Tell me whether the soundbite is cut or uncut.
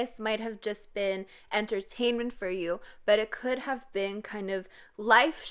uncut